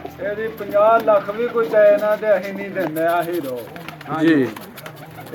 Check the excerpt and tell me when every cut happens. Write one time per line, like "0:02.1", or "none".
none